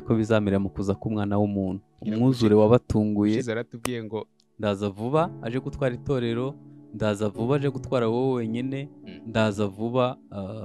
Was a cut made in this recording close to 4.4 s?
yes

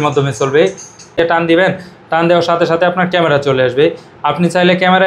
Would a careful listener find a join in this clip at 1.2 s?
yes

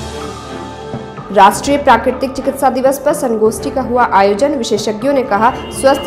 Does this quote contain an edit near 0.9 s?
no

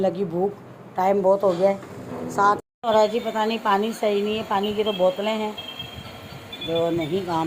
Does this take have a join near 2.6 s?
yes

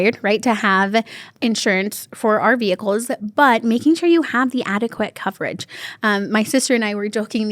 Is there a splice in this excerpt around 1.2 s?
yes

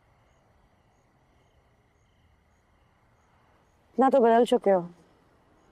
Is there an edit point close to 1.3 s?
yes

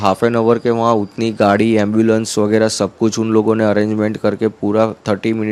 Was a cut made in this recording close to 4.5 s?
no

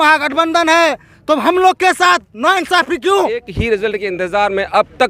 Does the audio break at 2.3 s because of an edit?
no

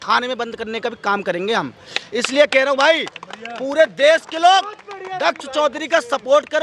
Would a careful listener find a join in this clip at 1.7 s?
no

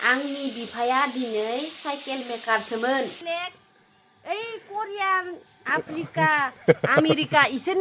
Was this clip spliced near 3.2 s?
yes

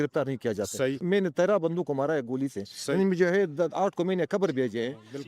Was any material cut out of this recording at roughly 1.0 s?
yes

